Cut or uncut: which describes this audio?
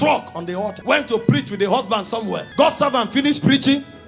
cut